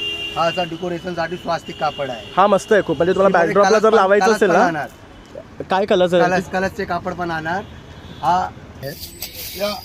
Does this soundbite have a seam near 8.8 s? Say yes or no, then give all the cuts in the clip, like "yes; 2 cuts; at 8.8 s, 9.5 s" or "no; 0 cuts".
yes; 1 cut; at 8.8 s